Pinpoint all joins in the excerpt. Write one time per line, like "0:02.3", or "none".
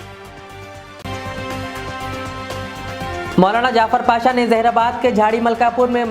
0:00.9
0:03.3